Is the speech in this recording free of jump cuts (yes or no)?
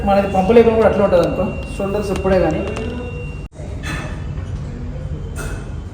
no